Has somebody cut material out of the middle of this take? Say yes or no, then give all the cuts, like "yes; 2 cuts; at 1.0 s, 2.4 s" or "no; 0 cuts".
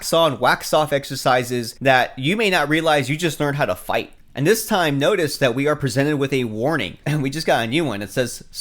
yes; 1 cut; at 4.1 s